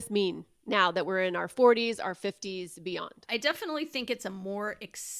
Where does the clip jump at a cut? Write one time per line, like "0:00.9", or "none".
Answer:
0:03.2